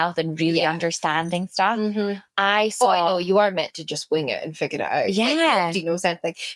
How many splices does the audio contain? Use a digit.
0